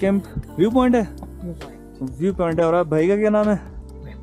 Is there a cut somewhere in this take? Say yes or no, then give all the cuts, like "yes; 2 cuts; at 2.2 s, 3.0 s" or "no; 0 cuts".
no; 0 cuts